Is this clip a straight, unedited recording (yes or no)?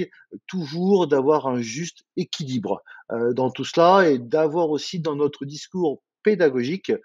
yes